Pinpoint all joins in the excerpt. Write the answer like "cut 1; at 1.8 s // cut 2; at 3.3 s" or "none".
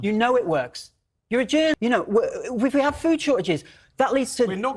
cut 1; at 1.7 s